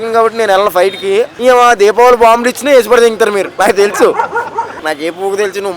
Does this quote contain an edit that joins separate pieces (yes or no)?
yes